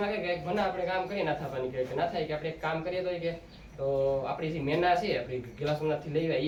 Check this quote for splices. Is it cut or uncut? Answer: uncut